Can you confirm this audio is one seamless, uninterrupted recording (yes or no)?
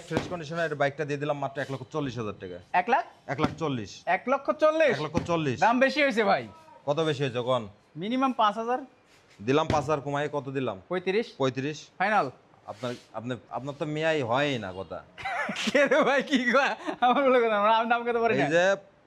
yes